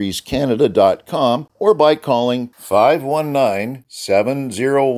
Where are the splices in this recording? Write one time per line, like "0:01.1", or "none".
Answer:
0:01.5